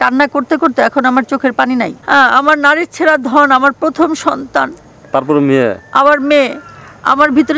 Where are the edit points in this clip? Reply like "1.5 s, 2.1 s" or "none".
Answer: 2.0 s